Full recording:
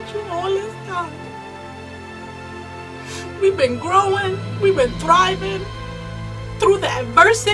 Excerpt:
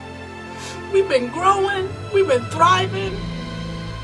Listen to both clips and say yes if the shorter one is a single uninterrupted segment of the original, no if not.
no